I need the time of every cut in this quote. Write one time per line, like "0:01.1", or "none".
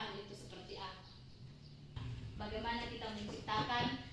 0:01.9